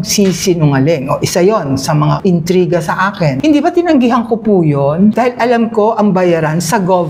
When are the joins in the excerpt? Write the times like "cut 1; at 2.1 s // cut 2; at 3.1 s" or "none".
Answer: cut 1; at 3.4 s